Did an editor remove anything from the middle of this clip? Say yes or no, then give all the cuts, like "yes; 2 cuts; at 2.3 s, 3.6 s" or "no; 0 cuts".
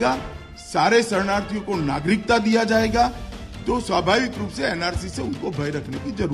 no; 0 cuts